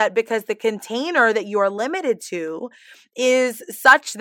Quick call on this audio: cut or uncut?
uncut